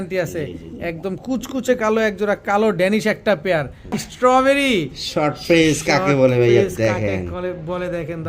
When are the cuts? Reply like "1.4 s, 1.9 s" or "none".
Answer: 4.0 s

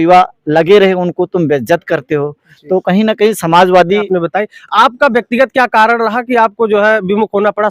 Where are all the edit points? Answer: 4.1 s

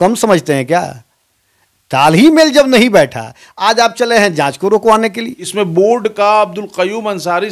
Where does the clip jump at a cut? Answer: 5.4 s

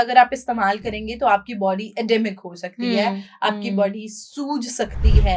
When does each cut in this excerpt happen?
none

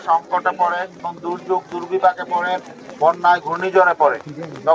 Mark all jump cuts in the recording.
1.0 s

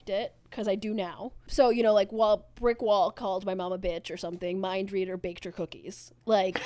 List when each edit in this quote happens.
1.4 s

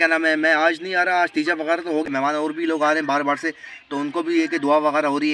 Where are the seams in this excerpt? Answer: 2.1 s

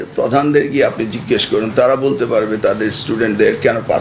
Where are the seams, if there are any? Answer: none

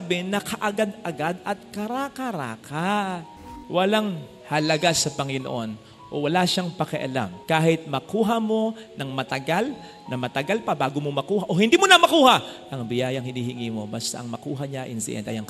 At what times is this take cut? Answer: 3.6 s

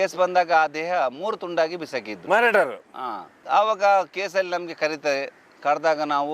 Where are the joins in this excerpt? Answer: none

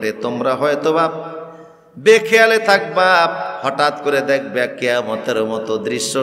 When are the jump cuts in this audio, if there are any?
none

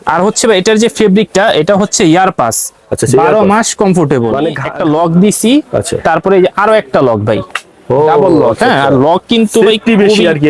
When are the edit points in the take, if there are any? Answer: 4.6 s

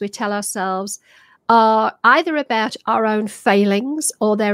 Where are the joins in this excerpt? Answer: none

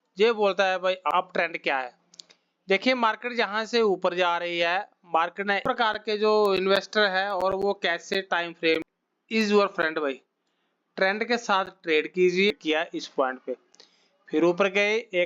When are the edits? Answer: 1.1 s, 5.6 s, 8.9 s, 12.5 s

